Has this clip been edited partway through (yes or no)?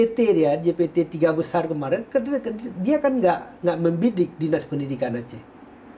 no